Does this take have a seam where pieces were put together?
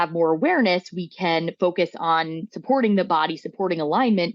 yes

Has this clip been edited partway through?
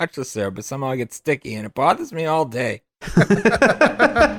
no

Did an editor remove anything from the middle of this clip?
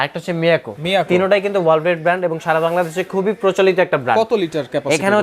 no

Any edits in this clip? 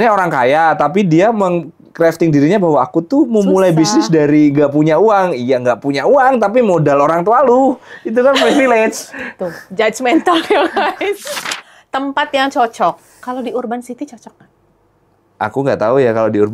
yes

